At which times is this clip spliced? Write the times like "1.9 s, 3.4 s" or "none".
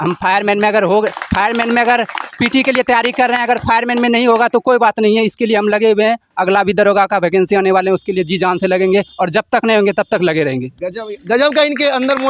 none